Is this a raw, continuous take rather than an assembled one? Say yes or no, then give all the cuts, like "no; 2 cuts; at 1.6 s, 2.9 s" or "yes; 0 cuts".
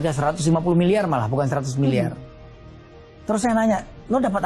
yes; 0 cuts